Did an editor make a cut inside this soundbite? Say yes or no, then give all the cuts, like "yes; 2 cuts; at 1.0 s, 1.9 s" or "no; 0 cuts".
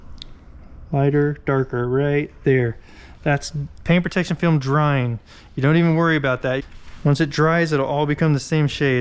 yes; 1 cut; at 6.7 s